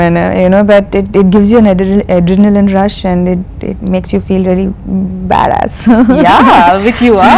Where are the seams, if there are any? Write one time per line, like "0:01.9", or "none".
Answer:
none